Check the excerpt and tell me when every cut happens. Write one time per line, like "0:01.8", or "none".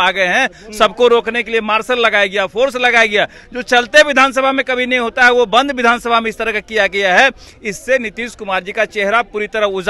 none